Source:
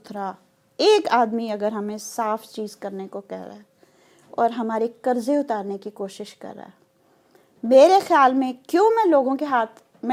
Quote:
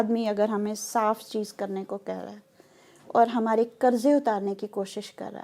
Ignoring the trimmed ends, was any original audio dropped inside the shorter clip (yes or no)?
no